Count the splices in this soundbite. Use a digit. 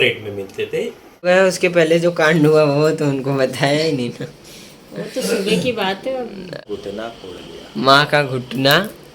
2